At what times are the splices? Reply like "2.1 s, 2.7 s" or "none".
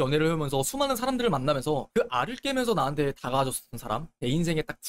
none